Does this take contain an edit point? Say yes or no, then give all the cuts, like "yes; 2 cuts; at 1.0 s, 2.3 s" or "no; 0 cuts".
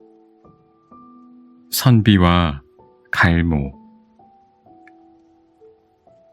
yes; 1 cut; at 1.3 s